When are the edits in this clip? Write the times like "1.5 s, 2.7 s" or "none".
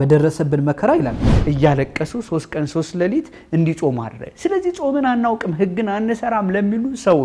1.3 s

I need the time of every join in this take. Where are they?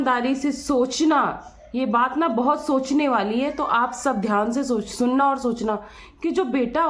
none

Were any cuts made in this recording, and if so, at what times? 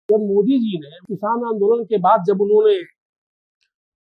0.9 s

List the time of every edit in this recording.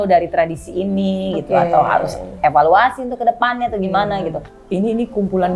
4.5 s

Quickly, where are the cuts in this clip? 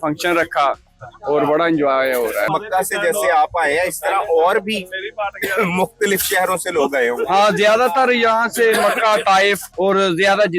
2.5 s, 9.7 s

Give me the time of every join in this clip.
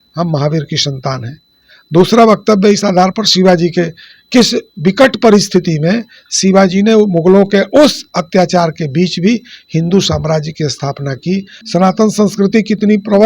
11.5 s

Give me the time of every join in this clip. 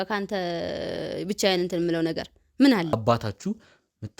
2.9 s

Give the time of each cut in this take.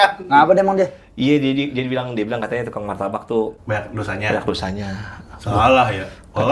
3.6 s

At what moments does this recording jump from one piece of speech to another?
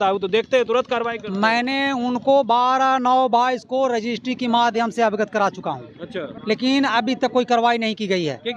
6.3 s

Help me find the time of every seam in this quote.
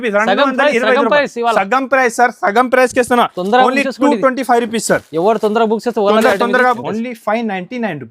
6.8 s

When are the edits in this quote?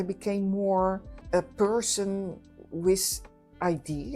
1.1 s

